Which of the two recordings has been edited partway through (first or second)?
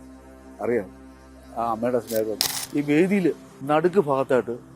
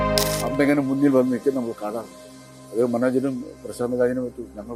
first